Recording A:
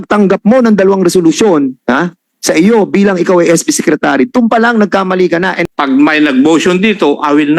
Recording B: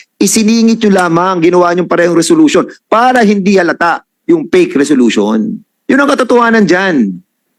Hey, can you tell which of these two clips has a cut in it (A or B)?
A